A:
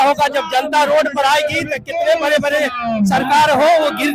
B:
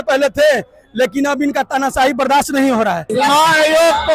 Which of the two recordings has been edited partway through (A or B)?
B